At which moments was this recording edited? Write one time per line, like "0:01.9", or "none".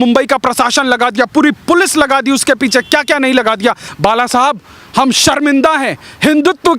0:03.9